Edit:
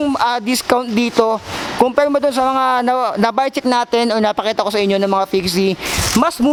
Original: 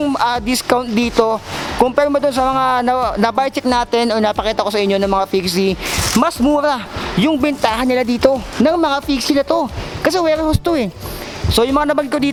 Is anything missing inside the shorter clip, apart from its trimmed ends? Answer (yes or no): no